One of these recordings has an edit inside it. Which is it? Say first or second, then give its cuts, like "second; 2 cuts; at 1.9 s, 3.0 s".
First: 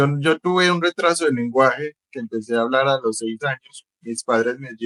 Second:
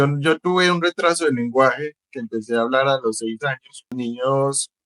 second; 1 cut; at 3.9 s